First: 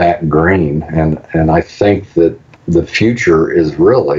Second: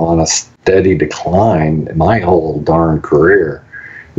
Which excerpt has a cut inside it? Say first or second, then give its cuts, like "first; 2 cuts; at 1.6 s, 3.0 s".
first; 1 cut; at 2.5 s